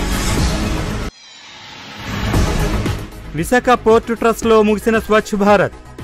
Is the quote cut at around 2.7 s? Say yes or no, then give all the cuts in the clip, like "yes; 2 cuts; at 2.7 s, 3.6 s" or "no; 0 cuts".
yes; 1 cut; at 2.7 s